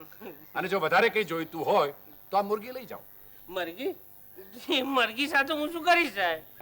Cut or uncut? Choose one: uncut